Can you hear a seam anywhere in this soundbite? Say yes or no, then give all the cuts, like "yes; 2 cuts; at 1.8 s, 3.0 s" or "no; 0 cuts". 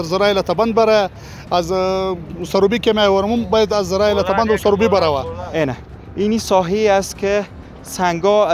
yes; 1 cut; at 5.4 s